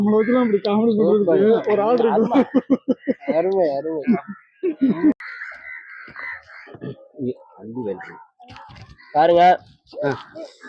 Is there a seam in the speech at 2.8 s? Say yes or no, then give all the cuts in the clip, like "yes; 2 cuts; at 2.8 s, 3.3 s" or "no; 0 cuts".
no; 1 cut; at 5.3 s